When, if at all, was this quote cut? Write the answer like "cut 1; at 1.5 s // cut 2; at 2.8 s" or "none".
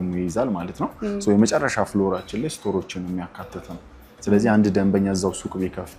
none